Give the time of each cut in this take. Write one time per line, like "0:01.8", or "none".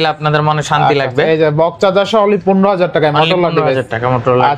none